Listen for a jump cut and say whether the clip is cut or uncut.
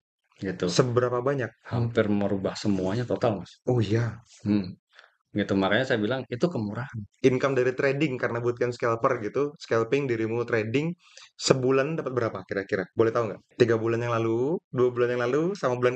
cut